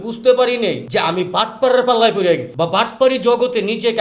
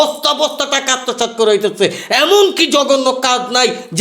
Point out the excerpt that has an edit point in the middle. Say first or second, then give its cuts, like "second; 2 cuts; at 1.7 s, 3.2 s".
first; 2 cuts; at 0.8 s, 2.5 s